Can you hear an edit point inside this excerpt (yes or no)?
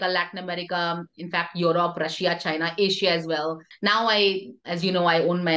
yes